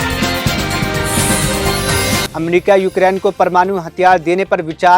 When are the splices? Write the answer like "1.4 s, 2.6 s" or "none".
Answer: 2.3 s